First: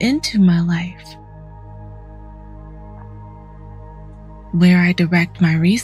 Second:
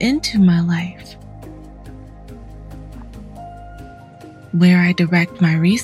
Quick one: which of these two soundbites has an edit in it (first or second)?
first